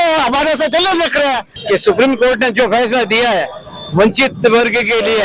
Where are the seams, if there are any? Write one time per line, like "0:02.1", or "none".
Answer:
0:01.5